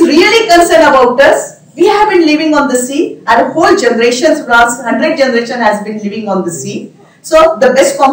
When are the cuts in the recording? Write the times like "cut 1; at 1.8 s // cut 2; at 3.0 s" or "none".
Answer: none